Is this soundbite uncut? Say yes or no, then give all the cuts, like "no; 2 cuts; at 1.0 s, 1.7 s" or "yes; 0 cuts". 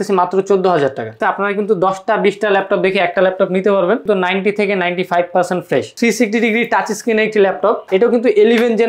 no; 4 cuts; at 1.2 s, 4.0 s, 5.9 s, 7.8 s